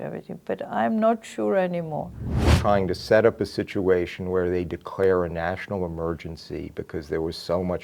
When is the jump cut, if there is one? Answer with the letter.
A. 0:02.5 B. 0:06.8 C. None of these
A